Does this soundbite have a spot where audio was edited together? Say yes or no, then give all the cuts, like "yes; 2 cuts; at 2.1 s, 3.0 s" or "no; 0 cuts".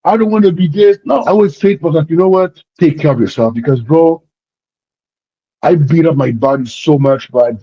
yes; 2 cuts; at 1.2 s, 2.6 s